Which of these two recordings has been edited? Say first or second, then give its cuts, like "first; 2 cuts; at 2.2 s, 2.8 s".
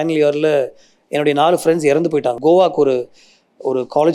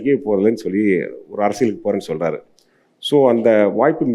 first; 1 cut; at 2.4 s